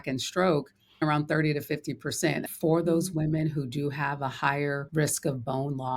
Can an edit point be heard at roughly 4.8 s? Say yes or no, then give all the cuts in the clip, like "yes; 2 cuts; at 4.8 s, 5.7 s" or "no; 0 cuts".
yes; 3 cuts; at 1.0 s, 2.5 s, 4.8 s